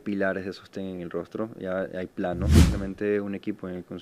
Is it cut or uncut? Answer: cut